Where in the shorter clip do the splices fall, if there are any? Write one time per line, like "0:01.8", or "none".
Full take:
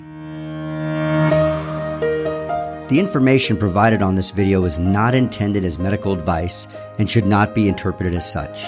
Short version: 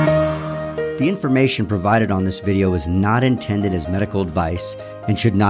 0:00.9